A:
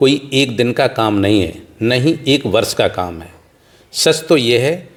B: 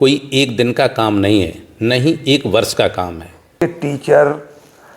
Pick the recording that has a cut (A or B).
B